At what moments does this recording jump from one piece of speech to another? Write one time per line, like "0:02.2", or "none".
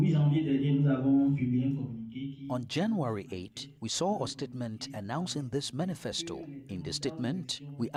none